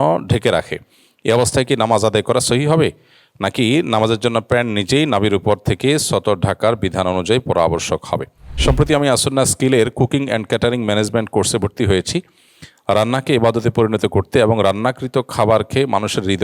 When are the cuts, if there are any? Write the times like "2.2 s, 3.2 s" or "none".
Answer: 8.5 s